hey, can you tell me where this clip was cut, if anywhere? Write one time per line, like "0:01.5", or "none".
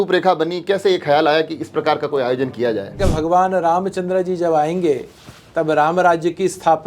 0:03.0